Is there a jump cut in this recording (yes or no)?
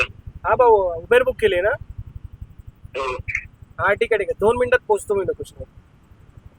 no